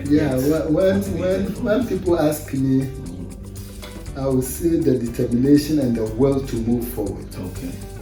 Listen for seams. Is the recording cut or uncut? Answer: uncut